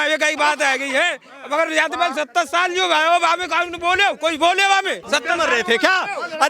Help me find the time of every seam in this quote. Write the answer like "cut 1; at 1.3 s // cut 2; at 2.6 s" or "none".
cut 1; at 5.0 s